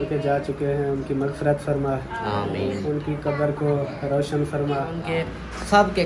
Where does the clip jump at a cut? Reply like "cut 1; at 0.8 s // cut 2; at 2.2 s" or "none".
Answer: cut 1; at 5.1 s